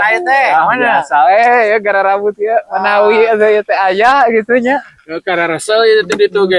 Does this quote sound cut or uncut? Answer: uncut